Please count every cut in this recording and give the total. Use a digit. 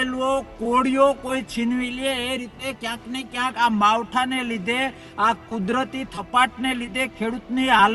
0